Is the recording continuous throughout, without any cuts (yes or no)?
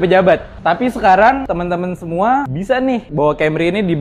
no